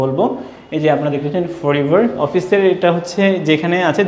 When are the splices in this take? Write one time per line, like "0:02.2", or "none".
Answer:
0:02.2